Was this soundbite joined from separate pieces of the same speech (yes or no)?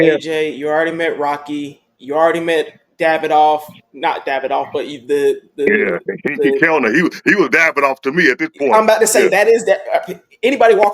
no